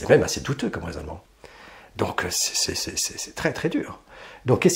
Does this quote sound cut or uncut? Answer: cut